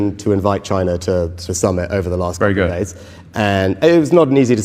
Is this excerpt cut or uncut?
uncut